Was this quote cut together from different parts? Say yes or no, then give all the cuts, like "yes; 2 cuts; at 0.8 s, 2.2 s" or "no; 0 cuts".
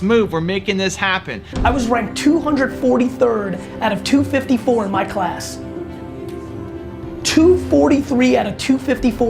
yes; 1 cut; at 1.5 s